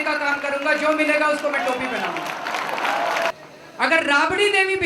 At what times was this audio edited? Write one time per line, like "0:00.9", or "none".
0:03.5